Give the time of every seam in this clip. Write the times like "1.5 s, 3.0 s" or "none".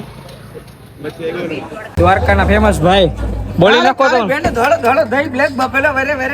1.9 s